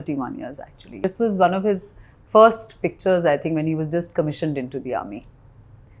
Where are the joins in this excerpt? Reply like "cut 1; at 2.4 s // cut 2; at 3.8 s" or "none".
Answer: cut 1; at 1.0 s